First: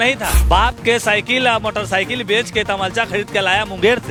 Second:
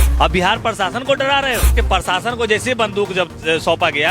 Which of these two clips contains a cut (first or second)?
second